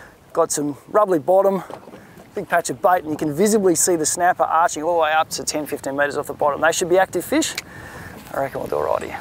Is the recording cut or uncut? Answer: uncut